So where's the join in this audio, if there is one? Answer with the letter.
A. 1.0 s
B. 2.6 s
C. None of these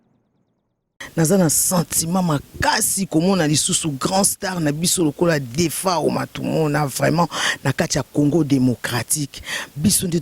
A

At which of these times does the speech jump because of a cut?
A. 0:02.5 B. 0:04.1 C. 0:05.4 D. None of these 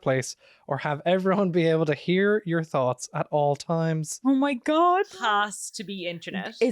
C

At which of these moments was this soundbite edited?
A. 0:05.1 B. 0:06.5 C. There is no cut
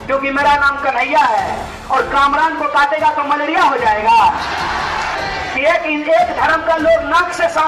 A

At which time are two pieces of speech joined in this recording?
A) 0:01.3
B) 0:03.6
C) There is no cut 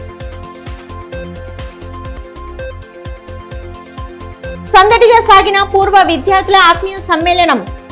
A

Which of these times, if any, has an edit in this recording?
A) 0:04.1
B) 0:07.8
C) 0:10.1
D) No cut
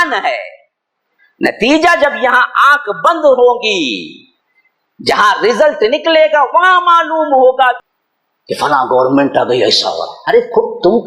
B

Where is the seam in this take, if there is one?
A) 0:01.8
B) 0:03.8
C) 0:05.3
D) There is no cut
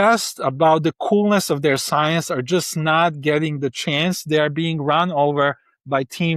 D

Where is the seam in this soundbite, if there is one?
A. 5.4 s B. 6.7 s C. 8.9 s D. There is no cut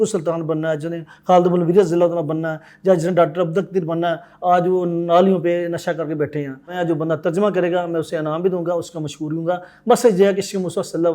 B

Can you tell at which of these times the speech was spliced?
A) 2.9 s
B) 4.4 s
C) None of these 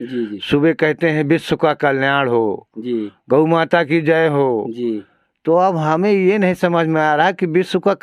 C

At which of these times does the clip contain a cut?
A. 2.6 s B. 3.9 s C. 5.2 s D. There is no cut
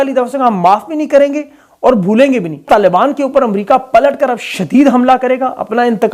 A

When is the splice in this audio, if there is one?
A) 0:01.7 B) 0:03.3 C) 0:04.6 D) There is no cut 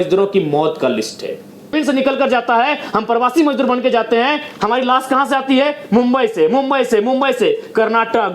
A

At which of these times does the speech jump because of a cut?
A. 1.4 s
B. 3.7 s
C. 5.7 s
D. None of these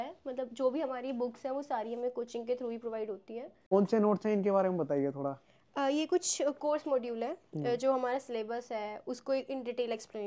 B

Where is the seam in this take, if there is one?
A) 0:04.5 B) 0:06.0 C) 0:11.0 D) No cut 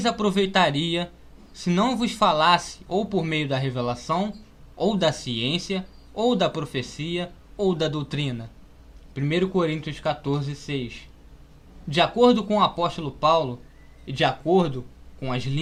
D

